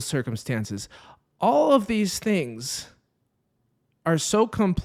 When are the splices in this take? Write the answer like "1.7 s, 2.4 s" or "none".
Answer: none